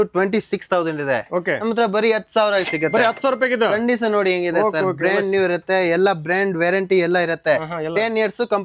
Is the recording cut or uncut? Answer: uncut